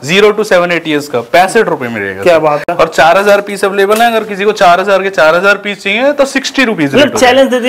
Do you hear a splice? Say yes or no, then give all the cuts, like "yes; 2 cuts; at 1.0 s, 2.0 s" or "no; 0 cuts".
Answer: no; 0 cuts